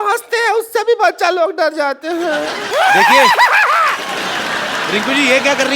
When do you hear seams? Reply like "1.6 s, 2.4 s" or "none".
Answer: 2.7 s